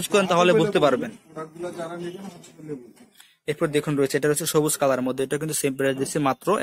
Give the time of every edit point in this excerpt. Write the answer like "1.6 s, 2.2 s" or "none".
none